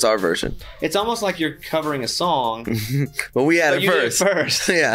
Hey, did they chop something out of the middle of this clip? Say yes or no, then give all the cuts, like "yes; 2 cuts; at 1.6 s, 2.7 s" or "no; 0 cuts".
no; 0 cuts